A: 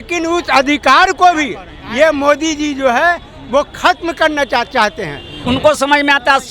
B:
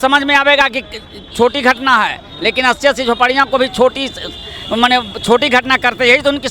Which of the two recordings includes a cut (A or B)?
A